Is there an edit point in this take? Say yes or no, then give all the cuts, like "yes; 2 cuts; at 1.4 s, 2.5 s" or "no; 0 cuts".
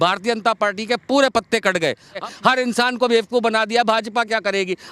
yes; 1 cut; at 2.2 s